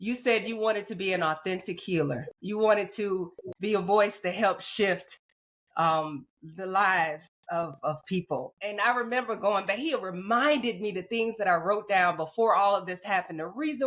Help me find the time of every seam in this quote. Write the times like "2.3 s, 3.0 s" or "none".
2.3 s, 8.5 s